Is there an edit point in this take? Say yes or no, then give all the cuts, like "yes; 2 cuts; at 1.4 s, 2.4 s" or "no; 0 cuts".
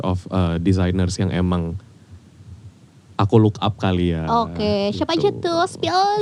no; 0 cuts